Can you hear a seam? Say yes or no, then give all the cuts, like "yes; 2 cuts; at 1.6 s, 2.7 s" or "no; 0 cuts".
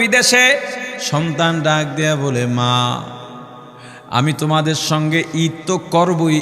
yes; 1 cut; at 1.0 s